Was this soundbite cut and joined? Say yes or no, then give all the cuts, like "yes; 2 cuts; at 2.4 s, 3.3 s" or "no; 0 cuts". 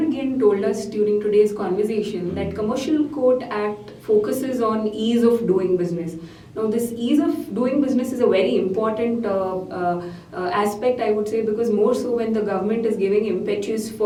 no; 0 cuts